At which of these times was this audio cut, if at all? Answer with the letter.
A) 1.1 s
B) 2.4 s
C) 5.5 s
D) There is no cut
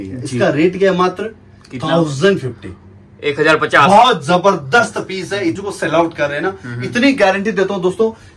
C